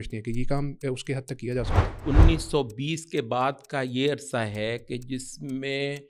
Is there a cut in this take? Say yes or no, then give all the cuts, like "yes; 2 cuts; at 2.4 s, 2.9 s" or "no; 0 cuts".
yes; 1 cut; at 2.0 s